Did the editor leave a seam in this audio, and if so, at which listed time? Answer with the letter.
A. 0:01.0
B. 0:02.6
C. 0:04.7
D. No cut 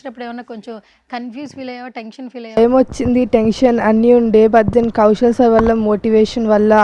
B